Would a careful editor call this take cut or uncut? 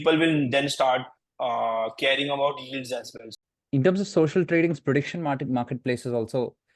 cut